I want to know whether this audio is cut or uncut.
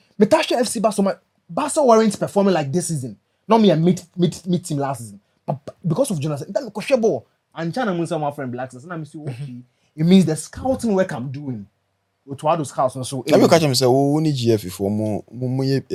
uncut